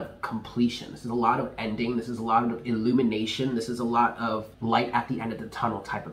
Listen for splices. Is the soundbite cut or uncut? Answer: cut